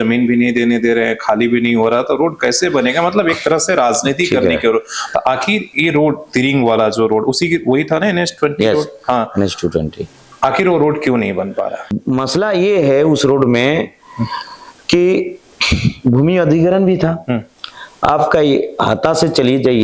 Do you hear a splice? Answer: yes; 2 cuts; at 10.2 s, 12.0 s

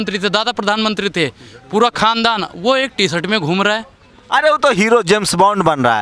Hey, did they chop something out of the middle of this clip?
no; 0 cuts

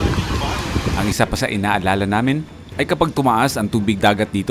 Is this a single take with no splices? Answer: no; 1 cut; at 0.9 s

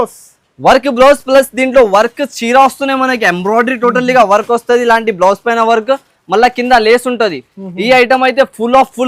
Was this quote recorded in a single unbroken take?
yes; 0 cuts

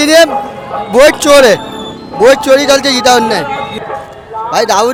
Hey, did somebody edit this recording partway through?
no; 0 cuts

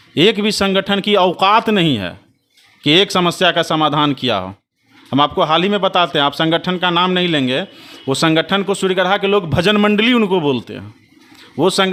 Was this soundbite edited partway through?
no; 0 cuts

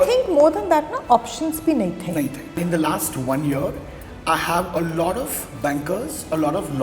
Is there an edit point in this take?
yes; 1 cut; at 2.5 s

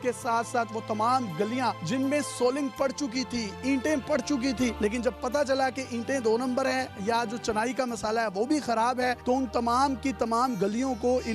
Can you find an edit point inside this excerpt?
no; 0 cuts

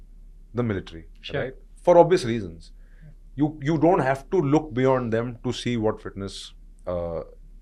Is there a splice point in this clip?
no; 0 cuts

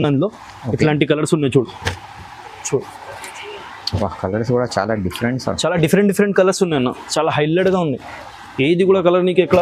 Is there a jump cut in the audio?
no; 0 cuts

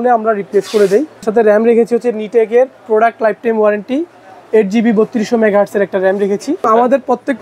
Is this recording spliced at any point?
yes; 2 cuts; at 1.3 s, 6.7 s

